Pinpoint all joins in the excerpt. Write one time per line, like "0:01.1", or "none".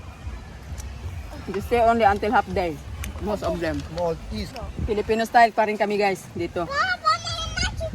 0:04.6